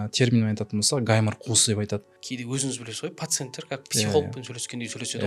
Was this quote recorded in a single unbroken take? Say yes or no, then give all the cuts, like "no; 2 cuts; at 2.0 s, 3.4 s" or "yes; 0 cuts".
no; 1 cut; at 2.2 s